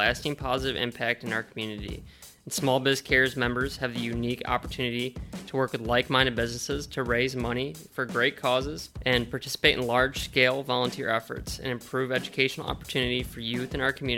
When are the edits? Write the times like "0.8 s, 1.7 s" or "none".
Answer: 8.9 s